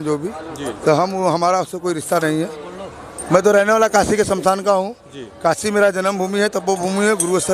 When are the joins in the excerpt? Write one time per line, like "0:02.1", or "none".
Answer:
none